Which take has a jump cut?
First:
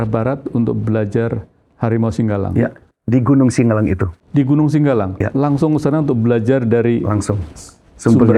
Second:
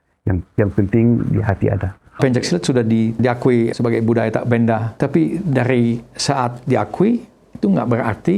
second; 3 cuts; at 2.2 s, 3.3 s, 4.9 s

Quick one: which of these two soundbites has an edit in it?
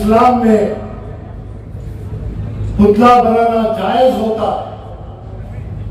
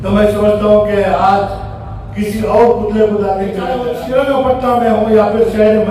second; 1 cut; at 3.8 s

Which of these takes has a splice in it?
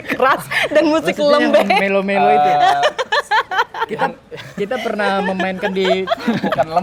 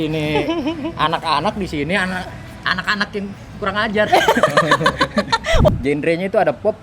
second; 1 cut; at 5.7 s

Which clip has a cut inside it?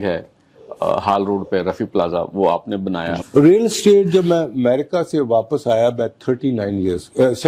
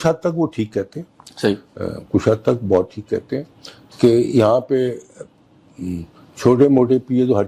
first; 1 cut; at 3.2 s

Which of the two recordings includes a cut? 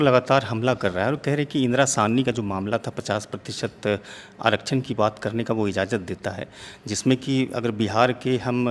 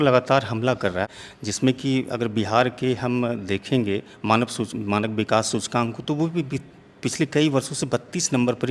second; 1 cut; at 1.0 s

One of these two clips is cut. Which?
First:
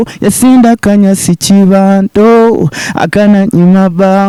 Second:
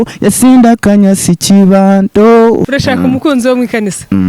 second; 1 cut; at 2.7 s

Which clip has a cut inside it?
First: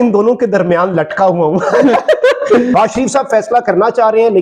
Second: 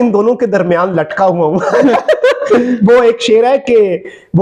first; 1 cut; at 2.8 s

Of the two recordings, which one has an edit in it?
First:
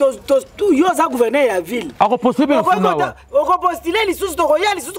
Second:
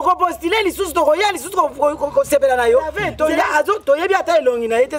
second; 1 cut; at 3.0 s

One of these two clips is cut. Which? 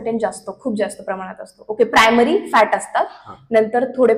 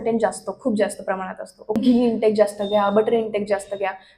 second; 1 cut; at 1.8 s

